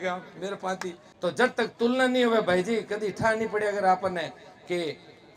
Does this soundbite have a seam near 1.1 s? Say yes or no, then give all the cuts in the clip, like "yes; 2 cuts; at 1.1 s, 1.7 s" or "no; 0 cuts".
yes; 1 cut; at 1.1 s